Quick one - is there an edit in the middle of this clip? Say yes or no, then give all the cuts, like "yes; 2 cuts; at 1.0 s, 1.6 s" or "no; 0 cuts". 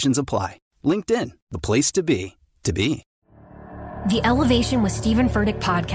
yes; 1 cut; at 3.1 s